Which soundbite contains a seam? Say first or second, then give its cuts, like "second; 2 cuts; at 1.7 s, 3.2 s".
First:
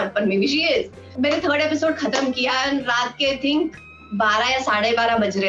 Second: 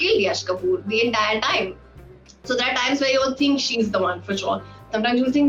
first; 1 cut; at 1.1 s